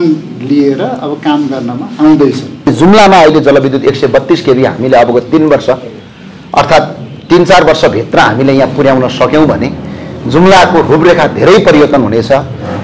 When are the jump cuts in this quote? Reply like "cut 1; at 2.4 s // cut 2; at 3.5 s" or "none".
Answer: cut 1; at 2.7 s